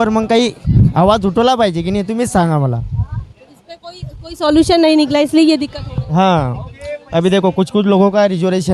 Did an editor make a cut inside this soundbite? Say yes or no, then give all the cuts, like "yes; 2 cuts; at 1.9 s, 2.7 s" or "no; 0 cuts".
no; 0 cuts